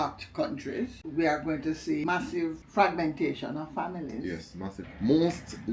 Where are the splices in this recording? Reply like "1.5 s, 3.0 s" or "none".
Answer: 1.0 s, 2.0 s, 4.8 s